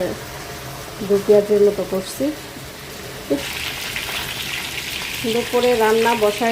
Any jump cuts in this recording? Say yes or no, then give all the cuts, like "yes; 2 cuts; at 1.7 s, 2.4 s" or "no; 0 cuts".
yes; 1 cut; at 3.4 s